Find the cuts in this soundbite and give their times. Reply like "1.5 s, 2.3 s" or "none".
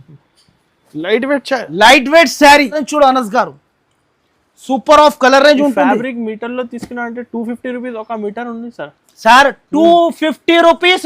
2.8 s